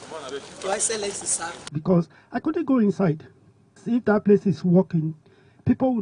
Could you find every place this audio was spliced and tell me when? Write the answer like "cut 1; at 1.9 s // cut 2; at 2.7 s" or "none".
cut 1; at 1.7 s